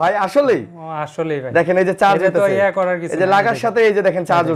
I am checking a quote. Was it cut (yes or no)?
no